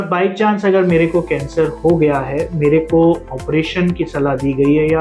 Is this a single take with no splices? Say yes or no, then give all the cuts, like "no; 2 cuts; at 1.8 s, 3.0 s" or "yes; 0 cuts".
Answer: yes; 0 cuts